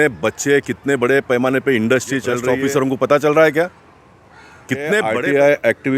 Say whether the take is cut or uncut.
cut